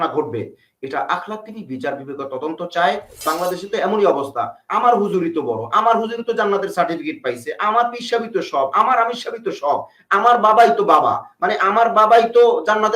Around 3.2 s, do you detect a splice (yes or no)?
yes